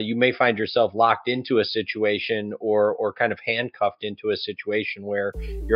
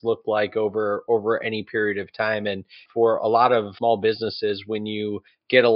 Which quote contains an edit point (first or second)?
second